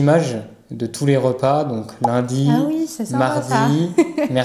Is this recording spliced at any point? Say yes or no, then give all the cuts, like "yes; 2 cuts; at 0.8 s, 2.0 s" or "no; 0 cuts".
no; 0 cuts